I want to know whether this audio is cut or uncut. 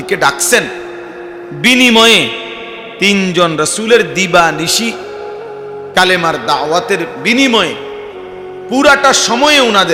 uncut